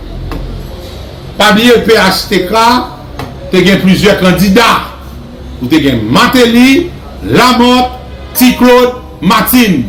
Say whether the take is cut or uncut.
uncut